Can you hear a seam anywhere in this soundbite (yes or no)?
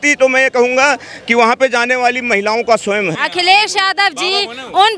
yes